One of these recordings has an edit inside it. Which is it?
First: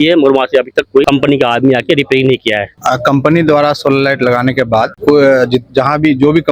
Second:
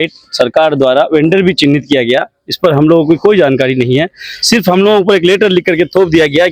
first; 3 cuts; at 1.0 s, 2.7 s, 4.9 s

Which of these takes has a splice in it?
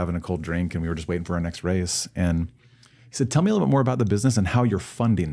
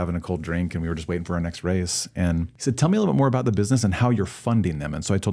second; 1 cut; at 2.5 s

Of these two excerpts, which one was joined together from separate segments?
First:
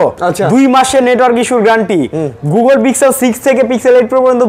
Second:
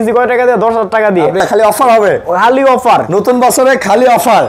second; 1 cut; at 1.4 s

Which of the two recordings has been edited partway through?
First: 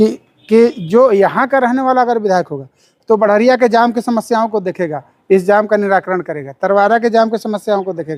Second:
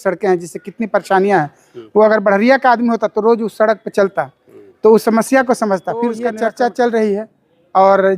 second; 1 cut; at 6.2 s

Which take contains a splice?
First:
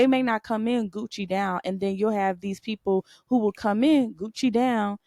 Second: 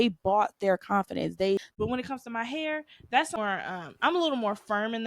second; 2 cuts; at 1.8 s, 3.4 s

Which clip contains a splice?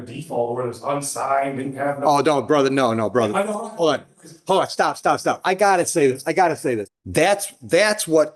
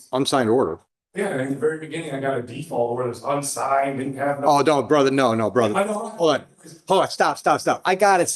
first; 1 cut; at 6.9 s

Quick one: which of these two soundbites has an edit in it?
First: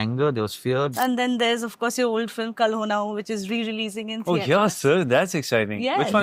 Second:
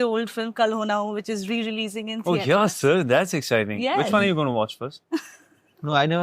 first; 1 cut; at 0.9 s

